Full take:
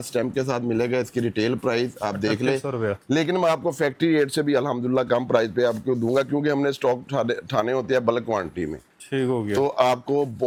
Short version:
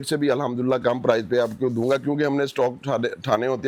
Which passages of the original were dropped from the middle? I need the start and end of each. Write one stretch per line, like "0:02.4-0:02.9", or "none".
none